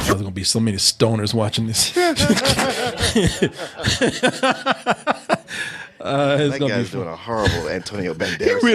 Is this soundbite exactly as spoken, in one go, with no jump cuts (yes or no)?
yes